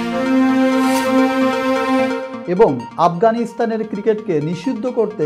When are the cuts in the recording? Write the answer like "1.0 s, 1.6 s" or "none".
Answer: none